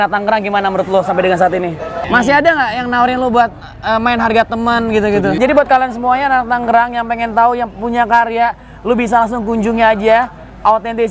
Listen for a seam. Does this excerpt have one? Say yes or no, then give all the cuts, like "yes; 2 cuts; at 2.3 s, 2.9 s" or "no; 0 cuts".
yes; 2 cuts; at 1.9 s, 5.4 s